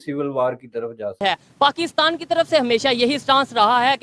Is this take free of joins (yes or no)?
no